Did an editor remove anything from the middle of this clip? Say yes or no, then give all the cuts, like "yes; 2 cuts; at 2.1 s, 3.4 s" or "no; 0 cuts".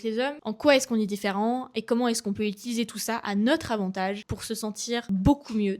yes; 1 cut; at 4.8 s